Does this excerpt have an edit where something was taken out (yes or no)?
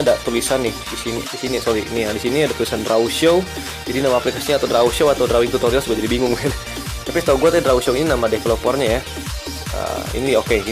yes